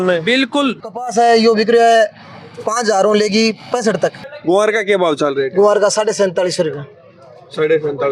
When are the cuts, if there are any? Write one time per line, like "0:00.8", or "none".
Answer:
0:00.9
0:04.2